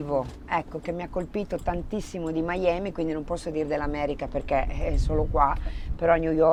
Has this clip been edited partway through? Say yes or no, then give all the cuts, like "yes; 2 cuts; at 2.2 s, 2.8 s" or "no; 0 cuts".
no; 0 cuts